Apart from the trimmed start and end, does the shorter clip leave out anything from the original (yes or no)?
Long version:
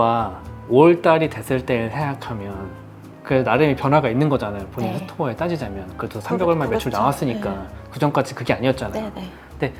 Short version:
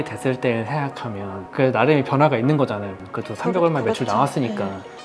yes